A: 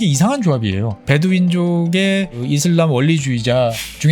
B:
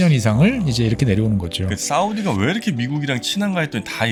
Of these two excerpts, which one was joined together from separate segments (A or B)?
A